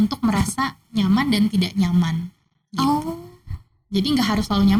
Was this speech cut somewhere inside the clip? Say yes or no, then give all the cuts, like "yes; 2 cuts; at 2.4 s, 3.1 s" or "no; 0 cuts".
no; 0 cuts